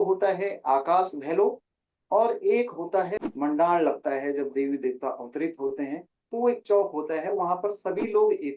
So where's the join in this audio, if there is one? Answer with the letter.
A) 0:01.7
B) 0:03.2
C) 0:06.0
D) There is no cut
B